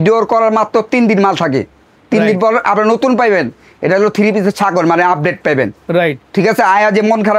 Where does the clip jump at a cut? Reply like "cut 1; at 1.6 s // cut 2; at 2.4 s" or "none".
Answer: none